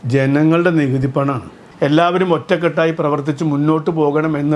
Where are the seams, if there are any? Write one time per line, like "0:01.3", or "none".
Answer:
0:01.6